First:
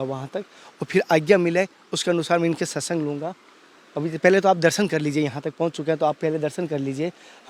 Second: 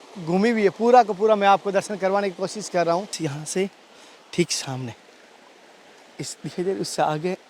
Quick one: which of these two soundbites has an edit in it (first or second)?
second